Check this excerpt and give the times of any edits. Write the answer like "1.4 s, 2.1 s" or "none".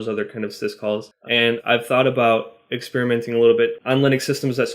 1.1 s, 3.8 s